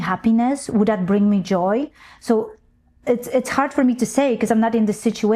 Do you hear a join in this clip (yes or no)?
no